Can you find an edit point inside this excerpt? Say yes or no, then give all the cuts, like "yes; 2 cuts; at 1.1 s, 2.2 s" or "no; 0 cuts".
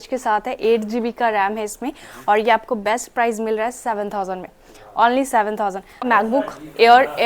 yes; 1 cut; at 6.1 s